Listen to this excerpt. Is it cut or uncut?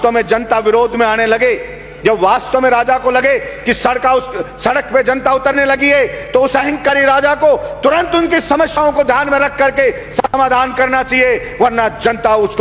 uncut